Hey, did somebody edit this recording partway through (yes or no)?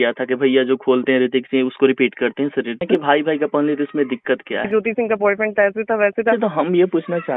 yes